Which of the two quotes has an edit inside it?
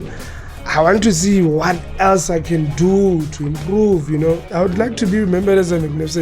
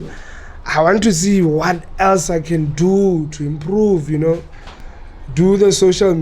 first; 1 cut; at 4.5 s

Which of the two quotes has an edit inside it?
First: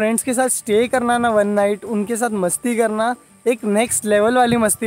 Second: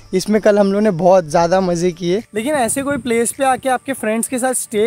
second; 1 cut; at 2.3 s

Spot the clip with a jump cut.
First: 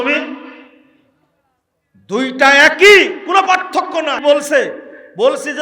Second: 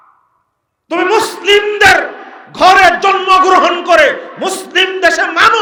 first; 1 cut; at 4.2 s

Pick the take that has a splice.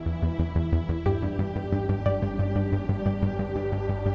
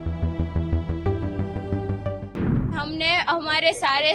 second; 1 cut; at 2.7 s

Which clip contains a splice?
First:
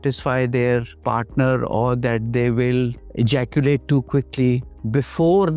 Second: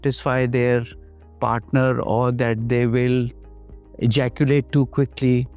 first; 3 cuts; at 0.9 s, 3.0 s, 4.6 s

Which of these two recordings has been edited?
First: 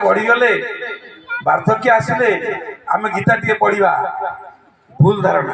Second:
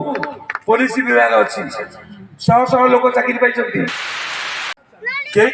second; 1 cut; at 4.4 s

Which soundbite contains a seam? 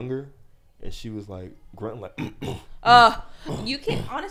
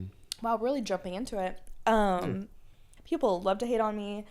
second; 1 cut; at 2.9 s

